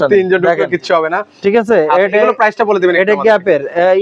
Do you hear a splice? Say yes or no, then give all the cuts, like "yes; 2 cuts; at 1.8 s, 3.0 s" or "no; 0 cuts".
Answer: no; 0 cuts